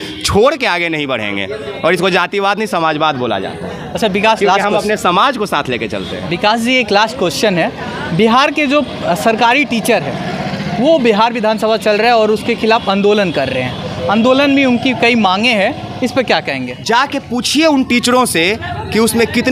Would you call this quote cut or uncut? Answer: uncut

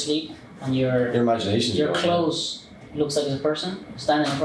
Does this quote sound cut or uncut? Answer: uncut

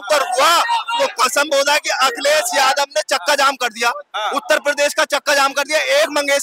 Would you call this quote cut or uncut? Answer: uncut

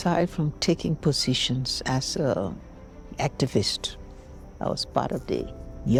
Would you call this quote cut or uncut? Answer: uncut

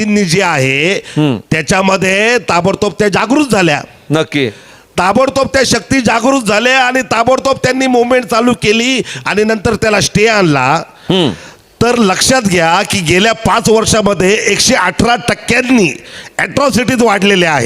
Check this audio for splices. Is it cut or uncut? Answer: cut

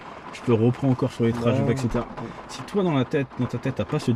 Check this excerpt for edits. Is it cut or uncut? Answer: uncut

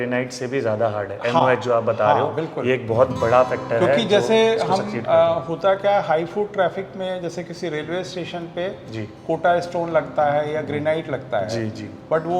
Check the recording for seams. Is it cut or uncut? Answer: uncut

